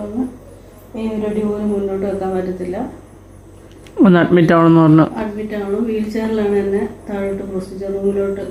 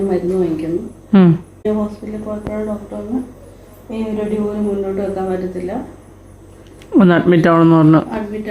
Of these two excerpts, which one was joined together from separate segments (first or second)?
second